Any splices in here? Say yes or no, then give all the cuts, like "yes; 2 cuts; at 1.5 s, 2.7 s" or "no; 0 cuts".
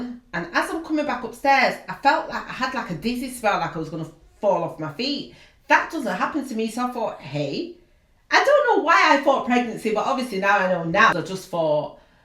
yes; 1 cut; at 11.1 s